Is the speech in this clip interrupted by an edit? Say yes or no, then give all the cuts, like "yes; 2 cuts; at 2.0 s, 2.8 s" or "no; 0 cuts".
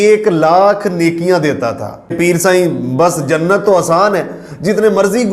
yes; 1 cut; at 2.1 s